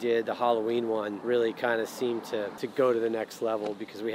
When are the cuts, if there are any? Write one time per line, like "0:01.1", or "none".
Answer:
0:01.2
0:02.6